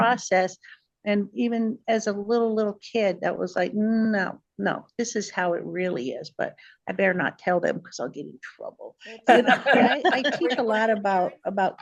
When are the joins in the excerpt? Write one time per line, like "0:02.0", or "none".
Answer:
0:10.3